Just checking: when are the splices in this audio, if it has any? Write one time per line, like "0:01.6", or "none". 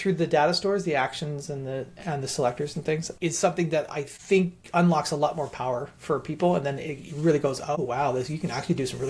0:07.8